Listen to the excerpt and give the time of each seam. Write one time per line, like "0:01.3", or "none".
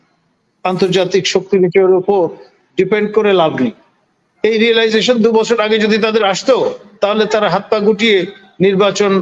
none

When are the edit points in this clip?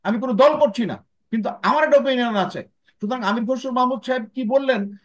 none

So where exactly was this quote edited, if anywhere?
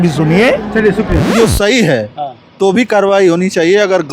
0:01.3

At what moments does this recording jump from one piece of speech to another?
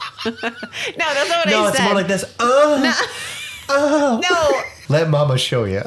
0:04.7

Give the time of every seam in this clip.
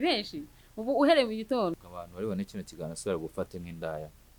0:01.8

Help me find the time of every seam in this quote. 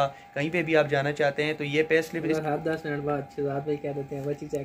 0:02.3

